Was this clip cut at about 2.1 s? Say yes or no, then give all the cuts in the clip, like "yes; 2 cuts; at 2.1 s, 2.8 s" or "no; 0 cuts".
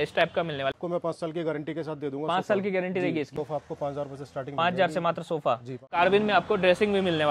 no; 3 cuts; at 0.7 s, 3.3 s, 6.0 s